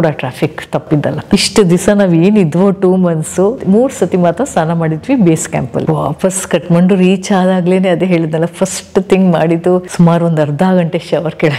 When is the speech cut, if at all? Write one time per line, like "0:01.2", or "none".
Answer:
0:01.2
0:03.6
0:05.8